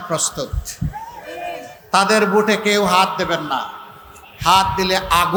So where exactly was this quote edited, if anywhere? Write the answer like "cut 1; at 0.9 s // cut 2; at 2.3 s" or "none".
none